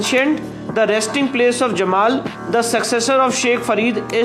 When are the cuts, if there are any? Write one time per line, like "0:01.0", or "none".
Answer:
none